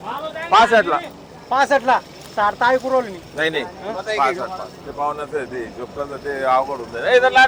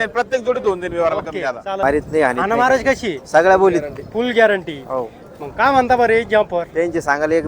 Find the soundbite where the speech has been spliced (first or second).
second